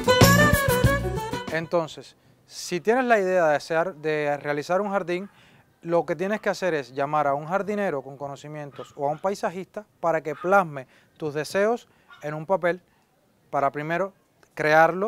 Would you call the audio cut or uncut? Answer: cut